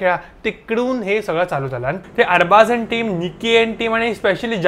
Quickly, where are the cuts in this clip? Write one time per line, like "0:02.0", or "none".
0:01.9